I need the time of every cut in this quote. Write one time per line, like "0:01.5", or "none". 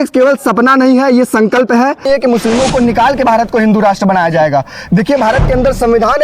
0:02.1